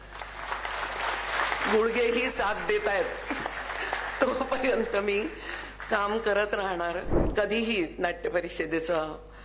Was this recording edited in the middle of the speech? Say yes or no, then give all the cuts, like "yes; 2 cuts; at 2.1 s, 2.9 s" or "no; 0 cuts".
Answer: yes; 1 cut; at 7.2 s